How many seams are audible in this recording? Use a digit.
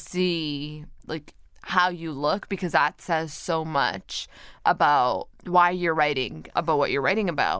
3